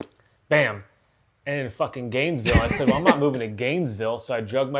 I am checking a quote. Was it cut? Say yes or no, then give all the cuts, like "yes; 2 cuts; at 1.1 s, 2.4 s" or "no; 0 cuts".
no; 0 cuts